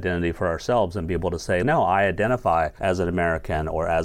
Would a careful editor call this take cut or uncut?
cut